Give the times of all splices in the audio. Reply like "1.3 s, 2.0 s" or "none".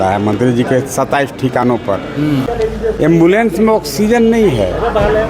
2.5 s